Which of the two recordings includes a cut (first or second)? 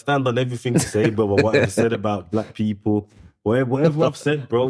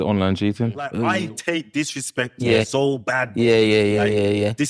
second